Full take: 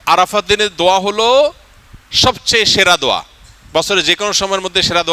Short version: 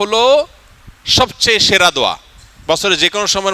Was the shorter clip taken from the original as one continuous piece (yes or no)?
yes